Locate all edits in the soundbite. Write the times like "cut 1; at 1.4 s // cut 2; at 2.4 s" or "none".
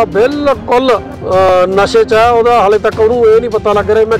cut 1; at 1.1 s